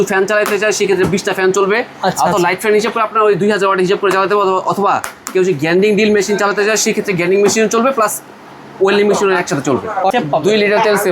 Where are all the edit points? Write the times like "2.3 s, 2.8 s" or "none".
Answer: 10.1 s